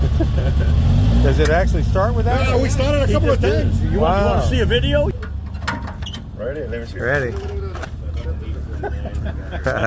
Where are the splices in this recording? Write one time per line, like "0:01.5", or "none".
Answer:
none